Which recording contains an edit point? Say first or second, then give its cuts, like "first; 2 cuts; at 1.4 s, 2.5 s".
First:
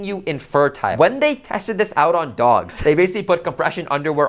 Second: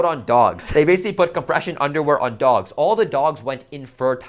first; 1 cut; at 0.9 s